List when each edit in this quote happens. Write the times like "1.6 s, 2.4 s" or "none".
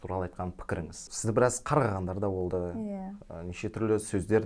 1.0 s